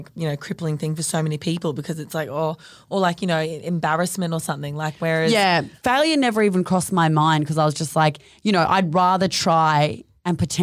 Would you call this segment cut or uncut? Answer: cut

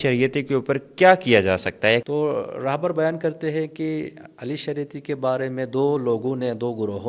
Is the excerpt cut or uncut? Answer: cut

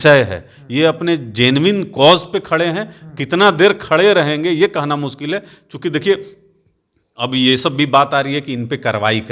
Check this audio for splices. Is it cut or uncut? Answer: uncut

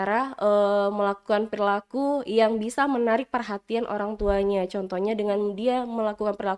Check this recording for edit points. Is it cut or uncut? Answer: uncut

